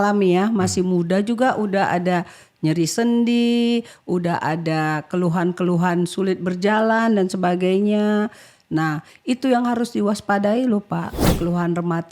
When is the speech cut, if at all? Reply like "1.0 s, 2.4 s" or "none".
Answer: 11.2 s